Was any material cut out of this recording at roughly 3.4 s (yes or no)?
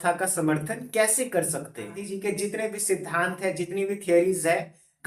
no